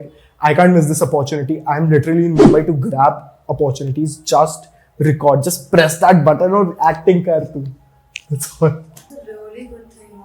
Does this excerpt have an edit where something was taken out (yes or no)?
yes